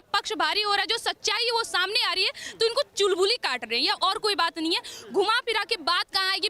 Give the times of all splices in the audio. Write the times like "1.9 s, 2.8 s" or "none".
none